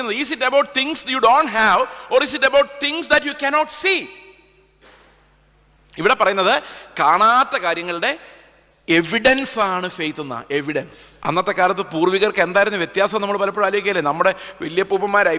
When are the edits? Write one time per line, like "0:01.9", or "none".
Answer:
0:11.0

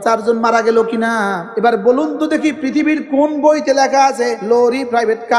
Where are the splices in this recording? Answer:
0:01.5
0:04.4

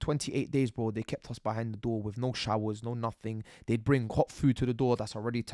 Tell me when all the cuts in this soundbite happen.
none

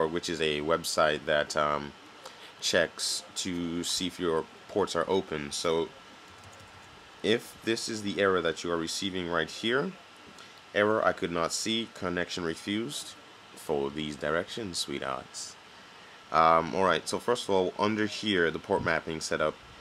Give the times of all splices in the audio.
none

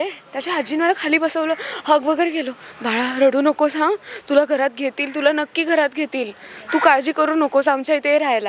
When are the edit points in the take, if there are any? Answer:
none

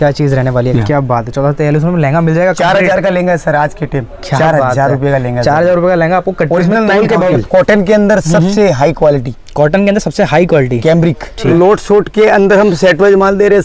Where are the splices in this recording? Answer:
0:00.7
0:07.3
0:11.5

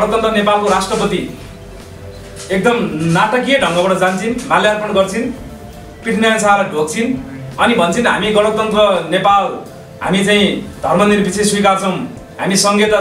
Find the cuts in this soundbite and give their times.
none

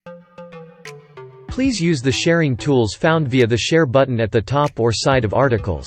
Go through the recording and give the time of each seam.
0:01.5

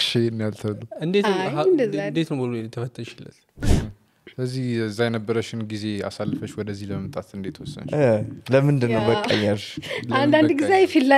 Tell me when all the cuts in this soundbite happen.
0:03.6

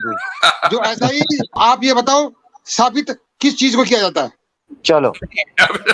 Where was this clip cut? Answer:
0:01.6
0:03.2

